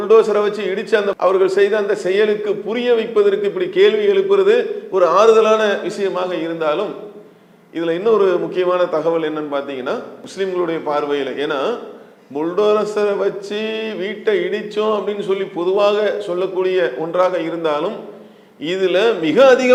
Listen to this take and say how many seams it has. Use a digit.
0